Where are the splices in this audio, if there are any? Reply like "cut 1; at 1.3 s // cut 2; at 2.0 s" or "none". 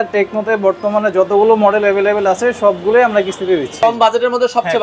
cut 1; at 3.8 s

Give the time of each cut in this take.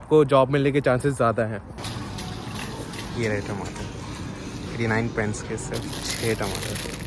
cut 1; at 1.7 s

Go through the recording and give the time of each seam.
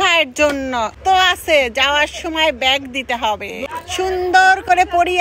cut 1; at 0.9 s // cut 2; at 3.6 s

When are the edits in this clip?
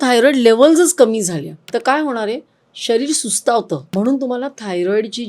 cut 1; at 1.6 s // cut 2; at 3.9 s

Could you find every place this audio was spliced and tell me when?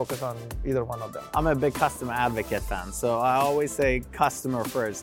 cut 1; at 1.2 s

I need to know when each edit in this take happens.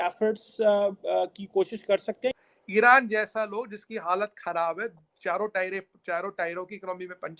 cut 1; at 2.5 s

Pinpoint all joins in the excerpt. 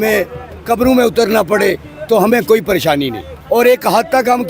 cut 1; at 3.6 s

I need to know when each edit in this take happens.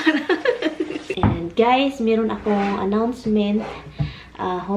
cut 1; at 1.1 s

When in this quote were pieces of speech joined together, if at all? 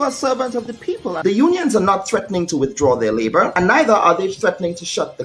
none

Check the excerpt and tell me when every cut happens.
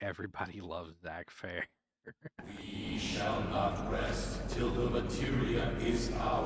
cut 1; at 2.4 s

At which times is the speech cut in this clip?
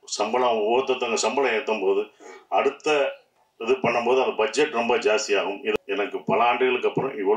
cut 1; at 5.7 s

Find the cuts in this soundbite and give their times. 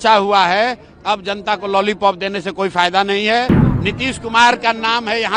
cut 1; at 3.6 s

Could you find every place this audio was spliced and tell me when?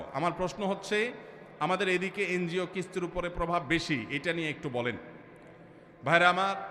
none

